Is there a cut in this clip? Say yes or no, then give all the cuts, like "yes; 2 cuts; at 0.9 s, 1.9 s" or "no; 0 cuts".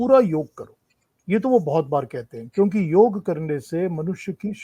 no; 0 cuts